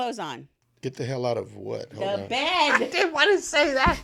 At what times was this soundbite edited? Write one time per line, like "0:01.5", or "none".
none